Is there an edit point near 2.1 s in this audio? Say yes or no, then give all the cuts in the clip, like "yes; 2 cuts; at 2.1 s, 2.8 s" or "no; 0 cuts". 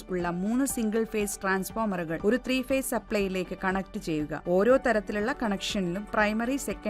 yes; 2 cuts; at 2.1 s, 4.4 s